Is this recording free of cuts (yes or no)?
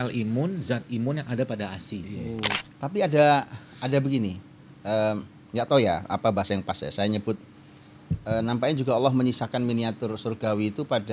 no